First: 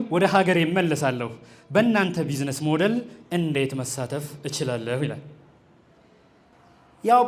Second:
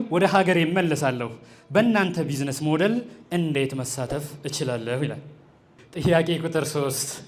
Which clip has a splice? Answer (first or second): second